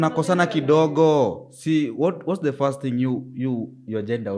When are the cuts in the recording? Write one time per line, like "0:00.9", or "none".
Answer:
none